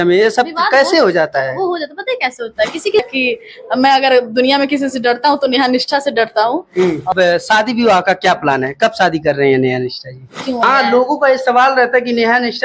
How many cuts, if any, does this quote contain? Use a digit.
3